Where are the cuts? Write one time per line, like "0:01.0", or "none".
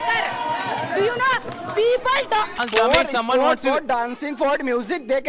0:02.6